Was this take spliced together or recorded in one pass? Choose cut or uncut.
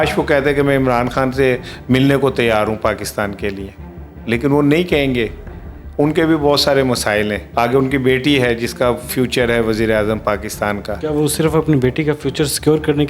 cut